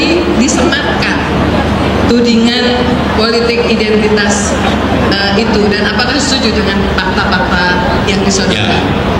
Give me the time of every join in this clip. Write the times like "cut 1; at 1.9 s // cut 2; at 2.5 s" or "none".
none